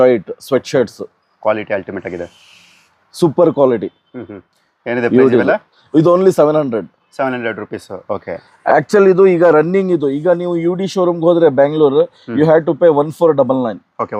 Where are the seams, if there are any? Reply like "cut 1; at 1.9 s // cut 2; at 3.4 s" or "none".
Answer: none